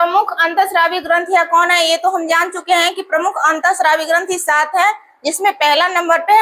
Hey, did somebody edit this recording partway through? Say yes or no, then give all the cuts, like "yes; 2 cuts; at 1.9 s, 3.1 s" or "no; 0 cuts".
no; 0 cuts